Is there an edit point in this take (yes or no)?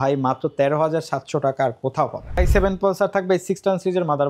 yes